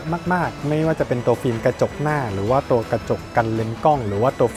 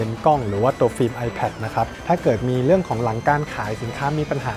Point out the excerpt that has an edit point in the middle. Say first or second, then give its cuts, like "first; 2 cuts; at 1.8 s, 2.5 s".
second; 1 cut; at 1.9 s